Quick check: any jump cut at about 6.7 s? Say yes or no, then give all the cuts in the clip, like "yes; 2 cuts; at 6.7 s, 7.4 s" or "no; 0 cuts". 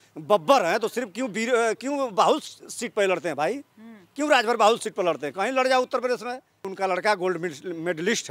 yes; 1 cut; at 6.7 s